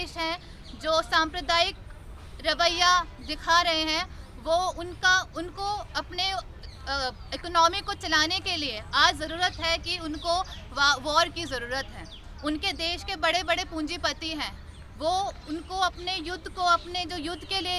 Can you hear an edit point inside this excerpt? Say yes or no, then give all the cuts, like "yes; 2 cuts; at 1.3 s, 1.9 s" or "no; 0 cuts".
no; 0 cuts